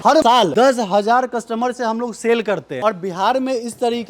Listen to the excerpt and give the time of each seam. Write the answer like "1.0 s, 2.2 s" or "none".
2.7 s

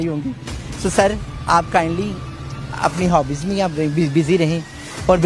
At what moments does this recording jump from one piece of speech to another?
none

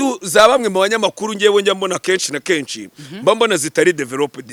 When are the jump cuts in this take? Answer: none

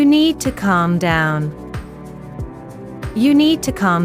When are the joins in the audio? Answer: 1.5 s, 3.1 s

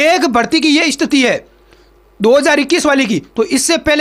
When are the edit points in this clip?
none

